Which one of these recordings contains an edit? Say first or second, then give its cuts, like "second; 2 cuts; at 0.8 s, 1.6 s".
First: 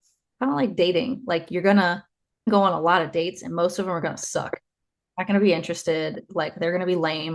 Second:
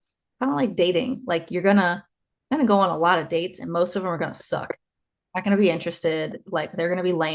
first; 1 cut; at 2.5 s